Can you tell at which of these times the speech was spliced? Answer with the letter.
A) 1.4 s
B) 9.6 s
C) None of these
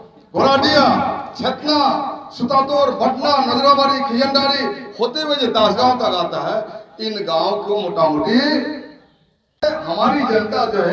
B